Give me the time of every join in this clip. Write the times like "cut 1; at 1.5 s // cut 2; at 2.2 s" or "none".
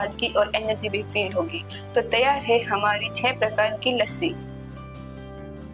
cut 1; at 4.3 s